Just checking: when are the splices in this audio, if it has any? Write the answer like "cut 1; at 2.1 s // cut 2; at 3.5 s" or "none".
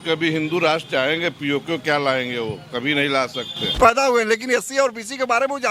cut 1; at 3.7 s